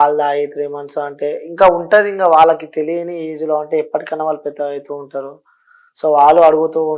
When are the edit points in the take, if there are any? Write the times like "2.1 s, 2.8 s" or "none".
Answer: none